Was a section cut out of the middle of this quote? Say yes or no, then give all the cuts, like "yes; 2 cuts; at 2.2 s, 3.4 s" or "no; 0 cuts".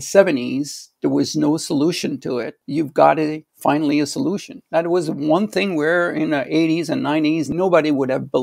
yes; 2 cuts; at 2.6 s, 7.5 s